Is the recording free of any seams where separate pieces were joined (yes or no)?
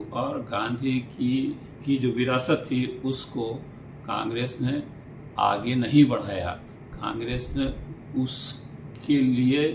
no